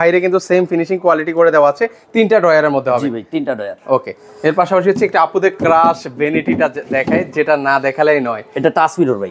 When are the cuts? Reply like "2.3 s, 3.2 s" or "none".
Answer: none